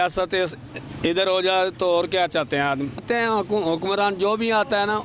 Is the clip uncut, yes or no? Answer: no